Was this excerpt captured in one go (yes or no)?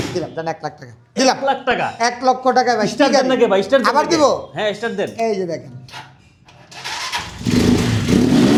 yes